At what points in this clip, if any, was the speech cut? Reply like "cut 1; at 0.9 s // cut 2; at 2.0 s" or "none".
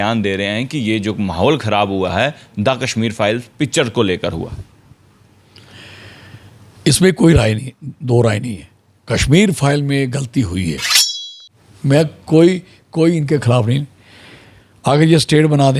cut 1; at 11.1 s